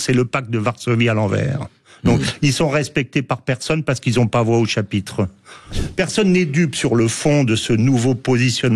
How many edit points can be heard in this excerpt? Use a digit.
1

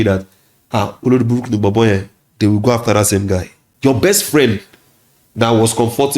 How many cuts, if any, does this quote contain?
1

